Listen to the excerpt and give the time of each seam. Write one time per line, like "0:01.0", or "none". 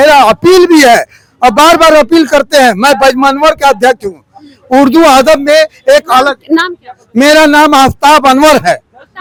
none